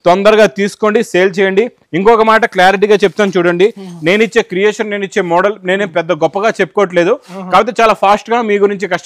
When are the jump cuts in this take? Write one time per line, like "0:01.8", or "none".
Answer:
none